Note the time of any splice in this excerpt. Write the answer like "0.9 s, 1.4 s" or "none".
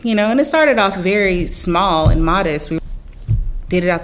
2.8 s